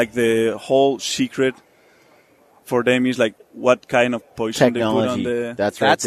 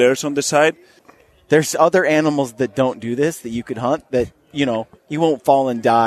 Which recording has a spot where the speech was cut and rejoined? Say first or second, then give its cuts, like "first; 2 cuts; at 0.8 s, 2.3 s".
second; 1 cut; at 1.0 s